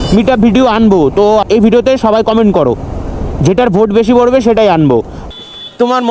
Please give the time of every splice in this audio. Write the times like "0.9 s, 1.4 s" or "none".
1.4 s, 5.2 s